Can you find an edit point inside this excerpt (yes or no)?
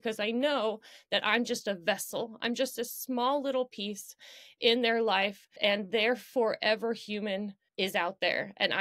yes